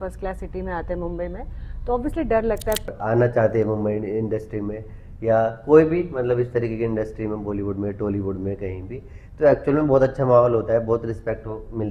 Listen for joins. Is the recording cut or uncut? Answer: cut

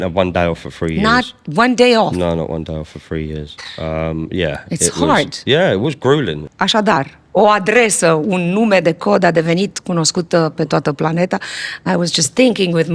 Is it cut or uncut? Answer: cut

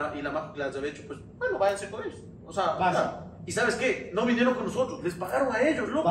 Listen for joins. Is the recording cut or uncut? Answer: uncut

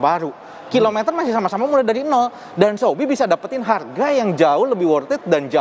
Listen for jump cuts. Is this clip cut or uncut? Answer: uncut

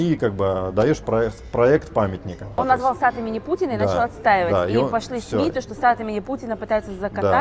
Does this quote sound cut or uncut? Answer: cut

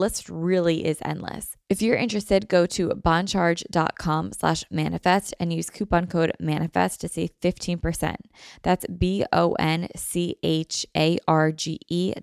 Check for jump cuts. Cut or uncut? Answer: cut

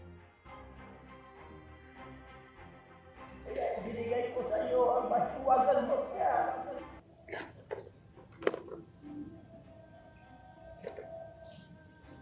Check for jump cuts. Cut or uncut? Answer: uncut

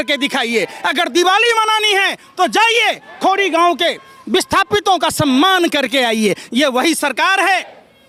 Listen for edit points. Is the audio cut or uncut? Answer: uncut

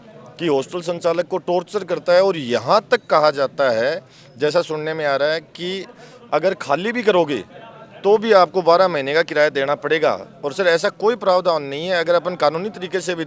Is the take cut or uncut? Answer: uncut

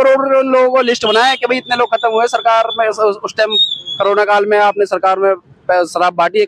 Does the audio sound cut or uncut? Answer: uncut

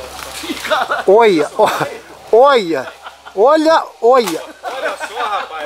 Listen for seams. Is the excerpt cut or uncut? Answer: uncut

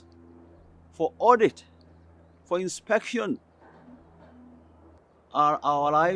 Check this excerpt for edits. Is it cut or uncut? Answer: cut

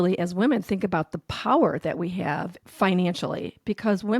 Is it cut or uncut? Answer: cut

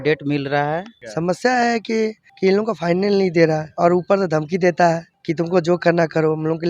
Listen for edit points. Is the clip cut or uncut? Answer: cut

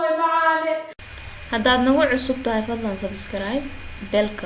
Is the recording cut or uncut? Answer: cut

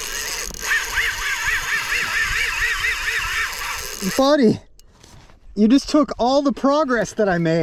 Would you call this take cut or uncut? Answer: uncut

